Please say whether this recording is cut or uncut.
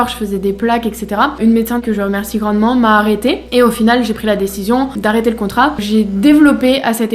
cut